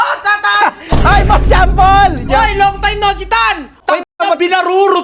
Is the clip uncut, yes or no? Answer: no